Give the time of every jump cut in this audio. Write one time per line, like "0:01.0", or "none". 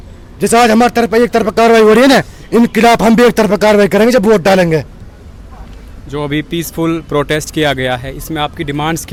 none

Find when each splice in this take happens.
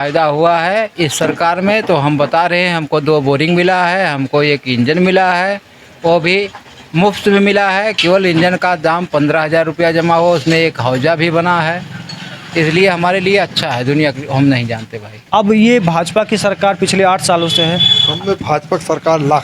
0:15.1

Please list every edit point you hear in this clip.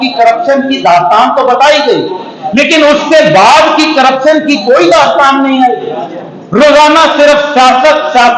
none

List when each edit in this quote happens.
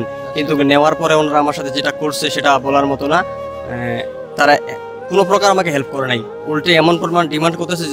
none

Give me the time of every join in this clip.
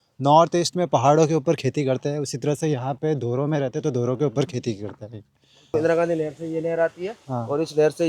0:05.7

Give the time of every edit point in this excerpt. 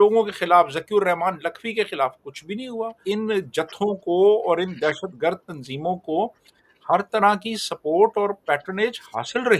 0:03.0

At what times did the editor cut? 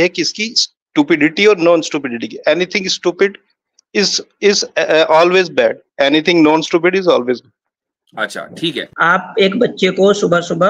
0:08.9

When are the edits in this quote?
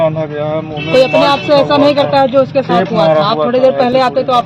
none

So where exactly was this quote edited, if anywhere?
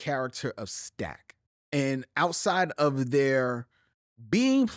0:01.5

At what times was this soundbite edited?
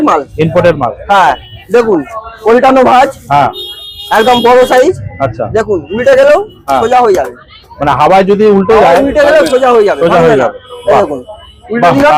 none

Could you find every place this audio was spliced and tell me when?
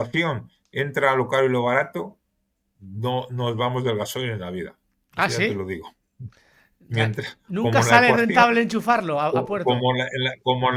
none

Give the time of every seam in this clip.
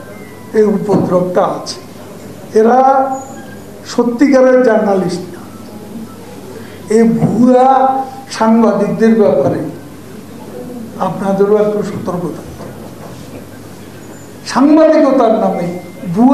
none

